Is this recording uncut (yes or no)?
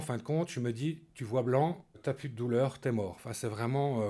no